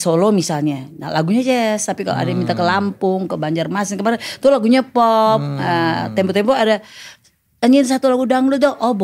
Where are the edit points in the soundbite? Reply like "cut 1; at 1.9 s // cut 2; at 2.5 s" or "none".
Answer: none